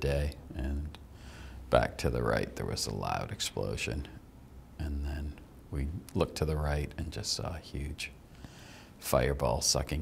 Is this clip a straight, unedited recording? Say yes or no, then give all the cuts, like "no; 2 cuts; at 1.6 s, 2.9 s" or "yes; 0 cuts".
yes; 0 cuts